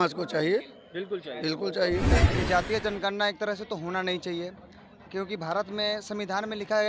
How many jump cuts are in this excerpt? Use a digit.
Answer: 1